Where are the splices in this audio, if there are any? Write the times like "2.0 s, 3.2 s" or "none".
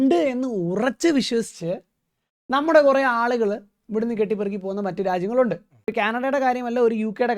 5.9 s